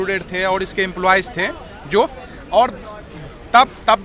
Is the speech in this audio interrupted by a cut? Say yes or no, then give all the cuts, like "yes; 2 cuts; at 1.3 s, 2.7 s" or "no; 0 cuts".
no; 0 cuts